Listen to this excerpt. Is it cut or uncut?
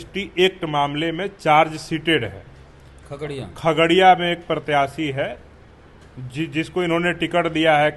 uncut